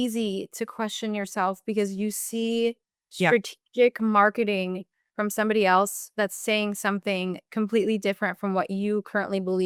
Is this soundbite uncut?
yes; 0 cuts

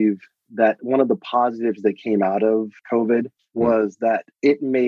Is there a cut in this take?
no; 0 cuts

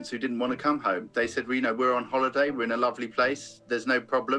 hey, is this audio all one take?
yes; 0 cuts

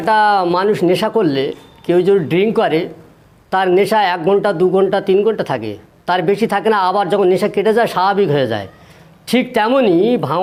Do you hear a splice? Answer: no; 0 cuts

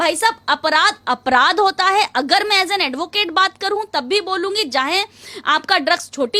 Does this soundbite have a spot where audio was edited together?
no; 0 cuts

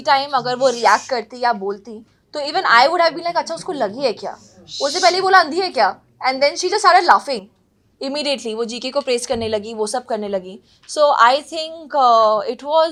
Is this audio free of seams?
yes; 0 cuts

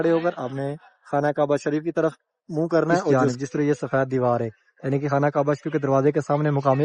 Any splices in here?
yes; 1 cut; at 3.1 s

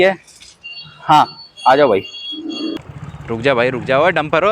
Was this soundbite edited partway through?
yes; 1 cut; at 2.8 s

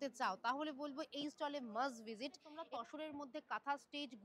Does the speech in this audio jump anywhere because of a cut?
yes; 1 cut; at 2.5 s

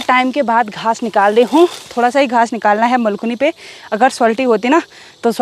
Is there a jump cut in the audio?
no; 0 cuts

